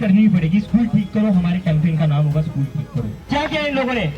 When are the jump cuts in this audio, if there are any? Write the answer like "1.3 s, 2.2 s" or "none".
3.2 s